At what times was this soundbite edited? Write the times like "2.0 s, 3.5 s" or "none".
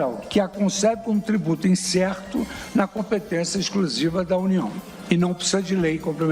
4.8 s